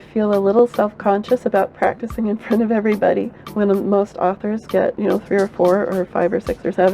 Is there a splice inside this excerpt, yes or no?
yes